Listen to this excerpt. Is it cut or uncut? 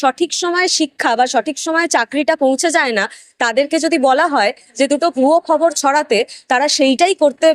uncut